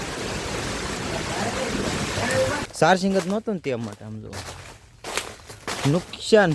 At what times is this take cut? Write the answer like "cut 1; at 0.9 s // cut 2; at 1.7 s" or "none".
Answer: cut 1; at 2.6 s